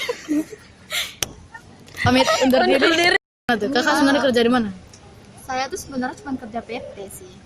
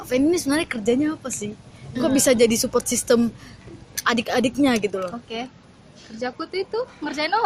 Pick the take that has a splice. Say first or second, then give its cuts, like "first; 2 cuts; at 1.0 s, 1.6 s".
first; 1 cut; at 3.5 s